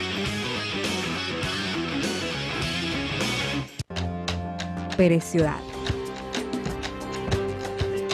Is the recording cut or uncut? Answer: cut